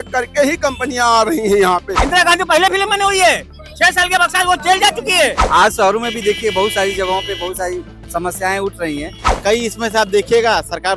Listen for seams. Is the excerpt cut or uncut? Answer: cut